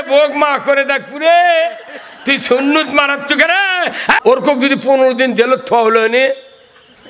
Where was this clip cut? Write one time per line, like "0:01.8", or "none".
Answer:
0:04.2